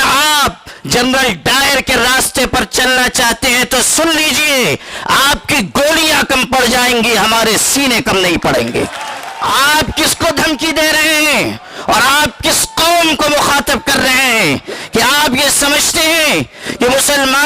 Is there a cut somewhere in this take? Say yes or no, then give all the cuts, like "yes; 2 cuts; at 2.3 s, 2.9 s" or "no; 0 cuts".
yes; 1 cut; at 9.3 s